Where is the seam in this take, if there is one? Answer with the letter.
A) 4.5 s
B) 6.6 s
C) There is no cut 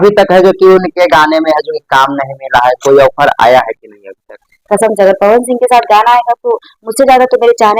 A